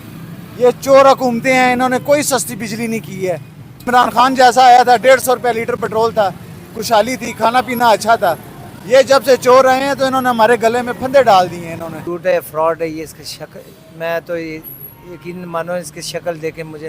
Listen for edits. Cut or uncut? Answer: cut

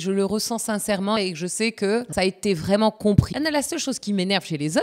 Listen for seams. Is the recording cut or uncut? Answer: cut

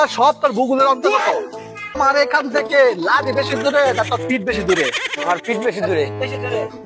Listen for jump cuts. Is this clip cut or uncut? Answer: cut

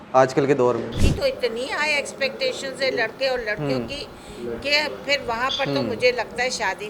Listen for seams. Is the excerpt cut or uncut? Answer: cut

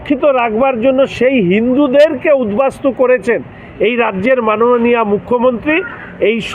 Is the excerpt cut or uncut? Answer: uncut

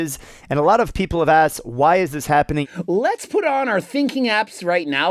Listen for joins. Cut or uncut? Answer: cut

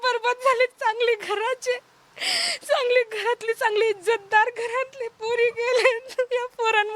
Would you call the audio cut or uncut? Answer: uncut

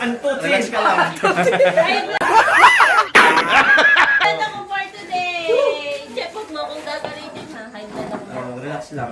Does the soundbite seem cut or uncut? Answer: uncut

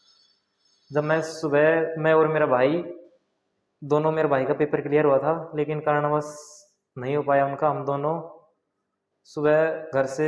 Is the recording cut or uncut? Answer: uncut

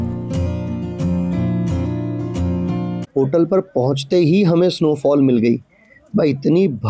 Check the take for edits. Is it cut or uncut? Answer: cut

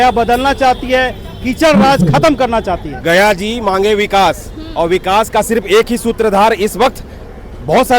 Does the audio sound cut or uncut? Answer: cut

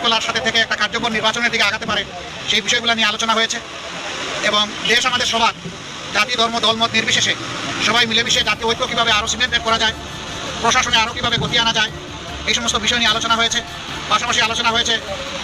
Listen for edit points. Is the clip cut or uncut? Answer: uncut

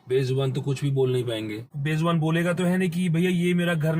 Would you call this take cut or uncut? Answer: cut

